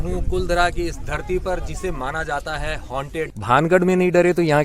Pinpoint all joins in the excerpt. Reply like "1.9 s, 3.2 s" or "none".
3.4 s